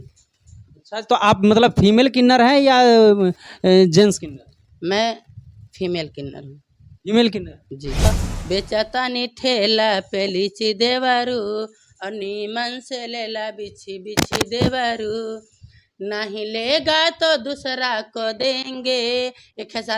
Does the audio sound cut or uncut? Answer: cut